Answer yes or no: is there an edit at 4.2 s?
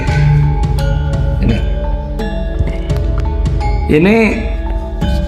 no